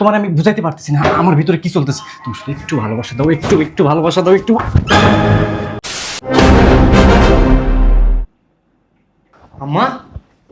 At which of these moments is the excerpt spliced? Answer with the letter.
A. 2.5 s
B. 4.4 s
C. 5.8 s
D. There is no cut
C